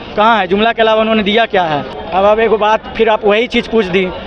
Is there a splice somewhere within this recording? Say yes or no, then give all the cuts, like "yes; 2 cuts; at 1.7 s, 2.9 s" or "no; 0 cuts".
no; 0 cuts